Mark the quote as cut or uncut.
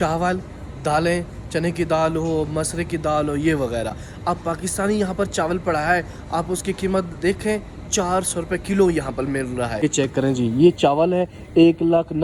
uncut